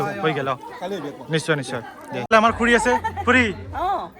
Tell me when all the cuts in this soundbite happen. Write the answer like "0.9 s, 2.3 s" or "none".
2.3 s